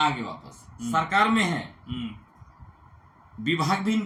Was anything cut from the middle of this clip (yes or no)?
no